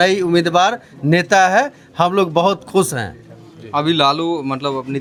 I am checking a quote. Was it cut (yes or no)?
no